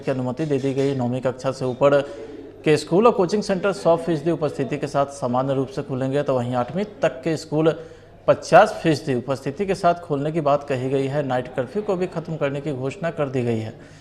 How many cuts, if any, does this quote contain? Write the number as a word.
zero